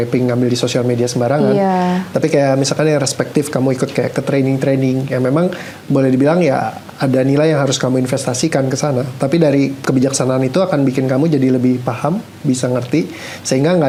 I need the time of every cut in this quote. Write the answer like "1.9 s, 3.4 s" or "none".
none